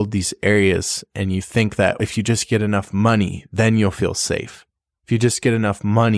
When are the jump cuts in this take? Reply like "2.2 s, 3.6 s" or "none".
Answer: 2.0 s